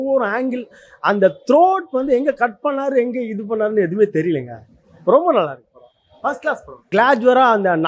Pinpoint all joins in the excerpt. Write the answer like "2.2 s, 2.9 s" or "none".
6.7 s

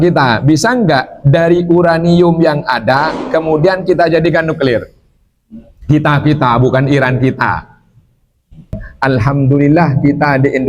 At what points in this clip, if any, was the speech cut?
8.9 s

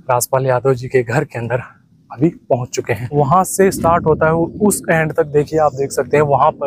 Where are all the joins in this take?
3.0 s

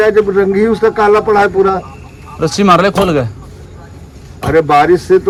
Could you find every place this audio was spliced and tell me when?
none

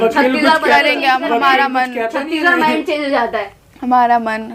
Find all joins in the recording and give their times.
none

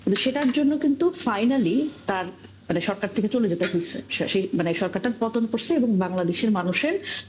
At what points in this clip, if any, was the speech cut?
none

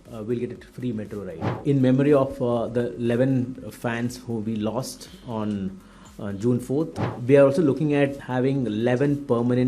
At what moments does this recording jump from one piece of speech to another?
1.3 s, 6.9 s, 8.2 s

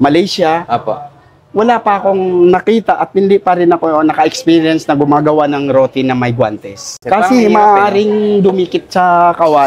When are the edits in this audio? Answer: 6.9 s

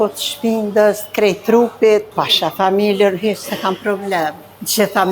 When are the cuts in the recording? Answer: 2.1 s

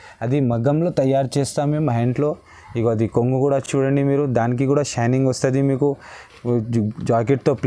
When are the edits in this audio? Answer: none

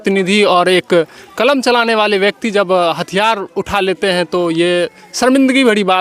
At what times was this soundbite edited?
none

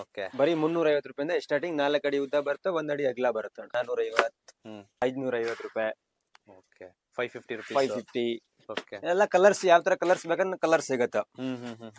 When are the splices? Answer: 3.7 s, 5.0 s

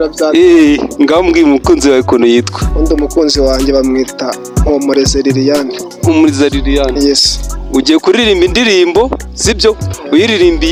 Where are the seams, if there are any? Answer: none

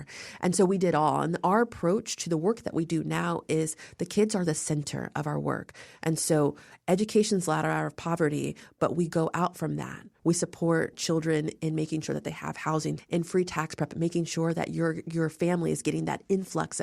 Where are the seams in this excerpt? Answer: 10.0 s, 13.0 s

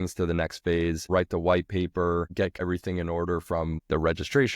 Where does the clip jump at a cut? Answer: 1.1 s, 2.5 s, 3.8 s

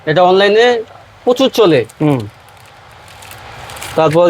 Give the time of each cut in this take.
none

